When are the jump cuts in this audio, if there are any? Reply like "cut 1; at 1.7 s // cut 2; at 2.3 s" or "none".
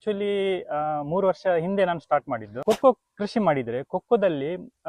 cut 1; at 2.5 s